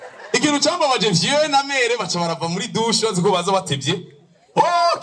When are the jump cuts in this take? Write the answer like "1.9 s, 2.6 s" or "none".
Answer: none